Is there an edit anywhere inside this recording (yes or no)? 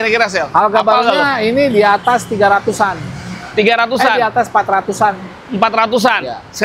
no